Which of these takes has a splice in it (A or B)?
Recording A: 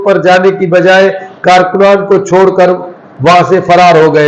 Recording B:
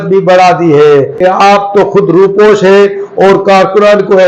B